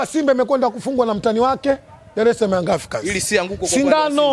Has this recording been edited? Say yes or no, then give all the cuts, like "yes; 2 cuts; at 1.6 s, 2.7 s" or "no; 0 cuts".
no; 0 cuts